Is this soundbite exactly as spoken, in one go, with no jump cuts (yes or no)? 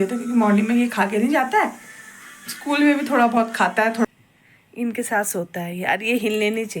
no